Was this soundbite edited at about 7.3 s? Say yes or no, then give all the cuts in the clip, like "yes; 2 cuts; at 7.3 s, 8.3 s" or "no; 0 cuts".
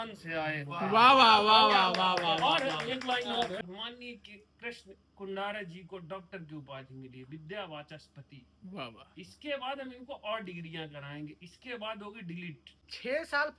no; 1 cut; at 3.6 s